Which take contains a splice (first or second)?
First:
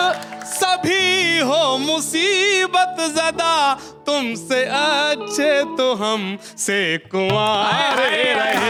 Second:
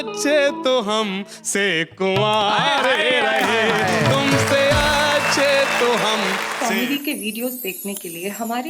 second